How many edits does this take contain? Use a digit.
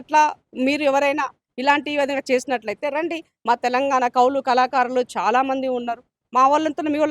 0